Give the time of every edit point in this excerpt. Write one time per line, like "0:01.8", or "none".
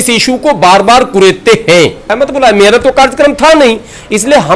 0:02.1